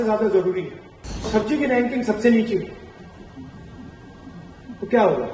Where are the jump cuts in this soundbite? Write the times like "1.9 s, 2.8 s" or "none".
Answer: 1.3 s